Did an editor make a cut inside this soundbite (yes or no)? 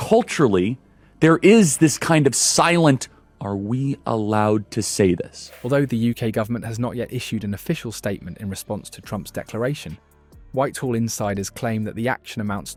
no